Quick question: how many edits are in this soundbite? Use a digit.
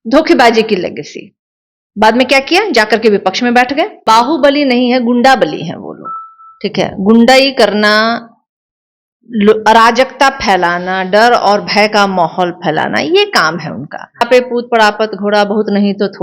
2